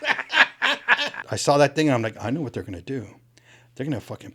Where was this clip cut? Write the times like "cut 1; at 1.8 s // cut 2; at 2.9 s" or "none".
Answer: cut 1; at 1.2 s